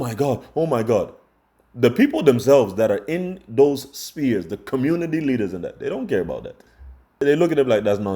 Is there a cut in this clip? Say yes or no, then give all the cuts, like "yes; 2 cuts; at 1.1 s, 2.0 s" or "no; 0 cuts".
yes; 1 cut; at 7.2 s